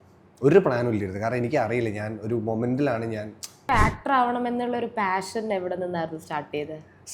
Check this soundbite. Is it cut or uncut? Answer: cut